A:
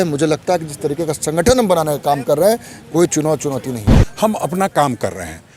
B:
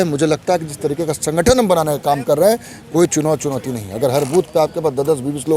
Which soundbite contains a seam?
A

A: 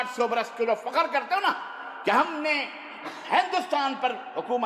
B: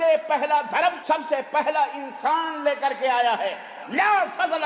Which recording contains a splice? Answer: B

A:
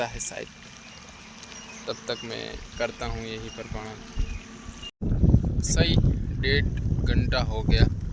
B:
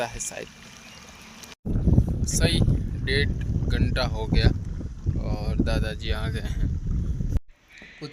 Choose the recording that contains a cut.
B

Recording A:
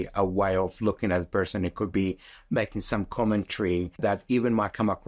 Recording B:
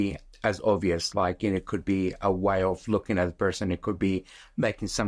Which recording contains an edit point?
A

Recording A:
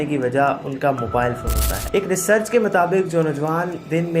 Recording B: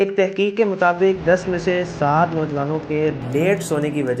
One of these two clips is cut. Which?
A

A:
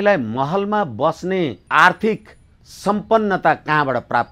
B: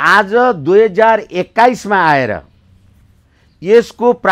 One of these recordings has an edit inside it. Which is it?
A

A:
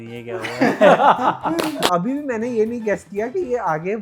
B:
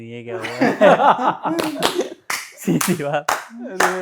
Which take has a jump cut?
A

